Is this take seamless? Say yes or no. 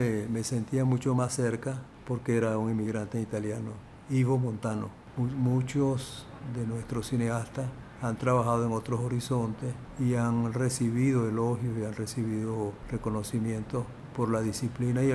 no